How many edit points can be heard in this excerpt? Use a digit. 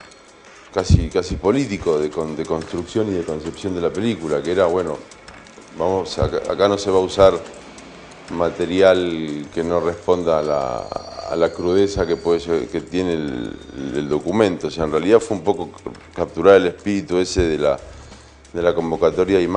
1